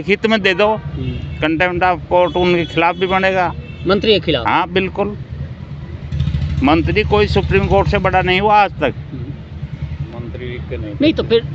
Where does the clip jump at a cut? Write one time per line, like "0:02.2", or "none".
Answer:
none